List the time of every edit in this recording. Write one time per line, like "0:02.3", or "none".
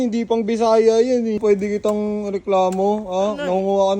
0:01.4

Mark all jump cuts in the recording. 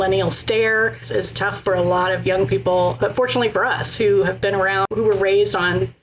0:01.0
0:03.0
0:04.8

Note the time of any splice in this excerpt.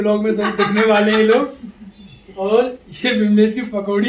none

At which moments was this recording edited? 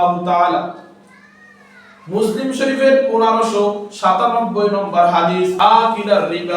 0:05.6

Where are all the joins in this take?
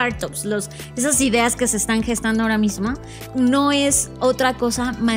0:03.1

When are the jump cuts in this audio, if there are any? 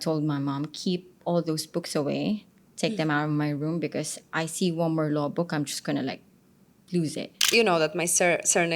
0:07.3

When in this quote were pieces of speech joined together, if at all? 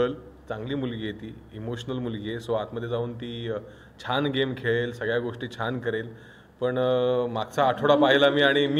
none

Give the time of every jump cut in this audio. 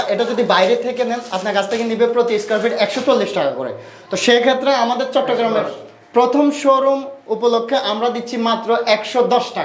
none

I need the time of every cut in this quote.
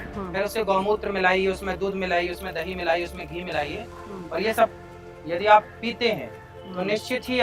none

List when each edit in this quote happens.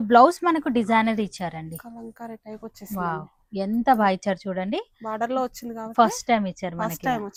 none

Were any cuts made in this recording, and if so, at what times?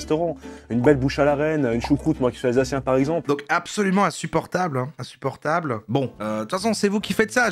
0:03.2

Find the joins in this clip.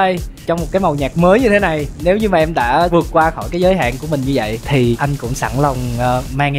none

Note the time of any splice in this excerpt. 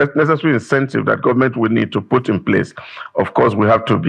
none

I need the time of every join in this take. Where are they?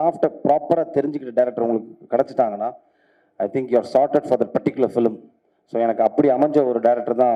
none

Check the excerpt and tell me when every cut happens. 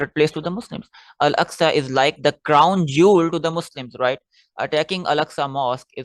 none

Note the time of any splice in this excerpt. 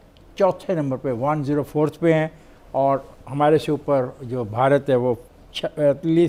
none

